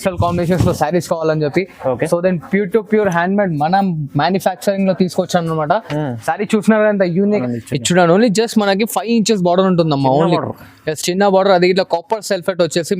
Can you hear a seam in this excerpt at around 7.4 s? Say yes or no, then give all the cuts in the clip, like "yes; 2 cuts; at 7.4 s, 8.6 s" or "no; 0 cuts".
yes; 1 cut; at 7.4 s